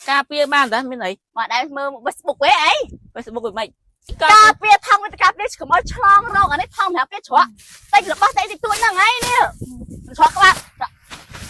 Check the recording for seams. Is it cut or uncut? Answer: cut